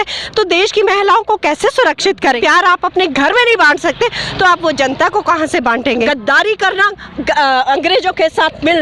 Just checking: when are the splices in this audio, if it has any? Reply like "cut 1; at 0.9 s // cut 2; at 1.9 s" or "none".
cut 1; at 2.4 s // cut 2; at 6.1 s